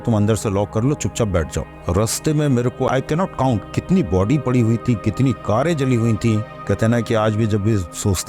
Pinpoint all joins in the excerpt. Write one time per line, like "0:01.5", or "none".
0:01.7
0:06.6

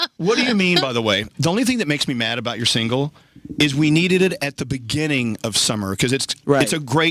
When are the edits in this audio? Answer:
0:01.5

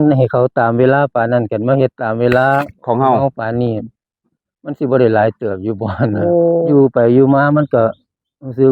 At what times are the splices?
0:06.7

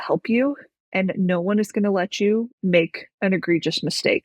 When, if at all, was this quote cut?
0:02.5

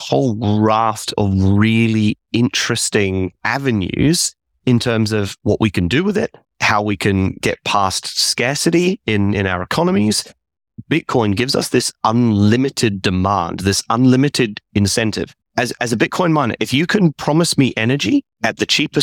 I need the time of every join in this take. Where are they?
0:05.3
0:10.8

